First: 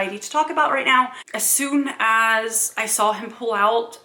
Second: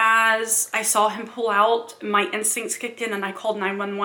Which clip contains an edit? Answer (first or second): first